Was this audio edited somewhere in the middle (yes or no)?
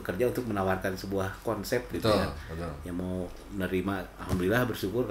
no